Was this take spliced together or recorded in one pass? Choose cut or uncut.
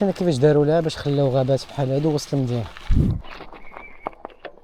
cut